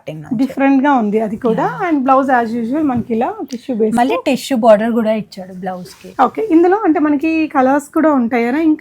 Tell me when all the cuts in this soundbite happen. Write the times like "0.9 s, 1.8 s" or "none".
none